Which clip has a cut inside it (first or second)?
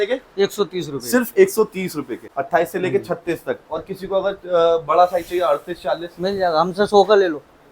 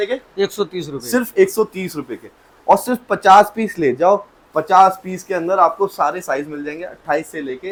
first